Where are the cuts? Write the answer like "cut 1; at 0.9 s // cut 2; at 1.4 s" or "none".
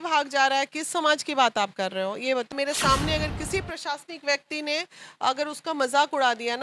cut 1; at 2.5 s